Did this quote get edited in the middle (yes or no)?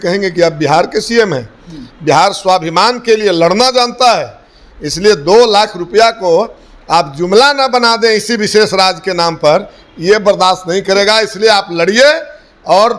no